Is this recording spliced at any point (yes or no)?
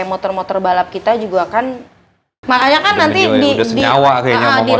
yes